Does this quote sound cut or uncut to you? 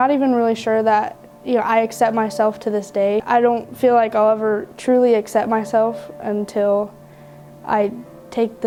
uncut